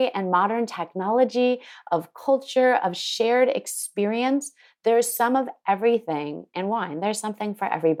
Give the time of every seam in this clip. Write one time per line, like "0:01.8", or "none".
none